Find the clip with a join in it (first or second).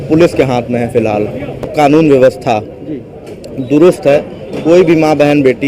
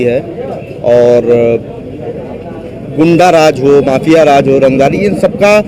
first